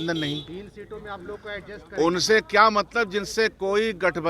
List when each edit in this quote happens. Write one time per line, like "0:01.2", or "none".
none